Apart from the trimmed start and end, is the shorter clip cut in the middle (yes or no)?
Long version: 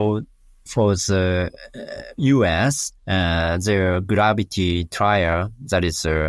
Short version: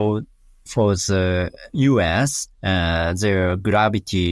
yes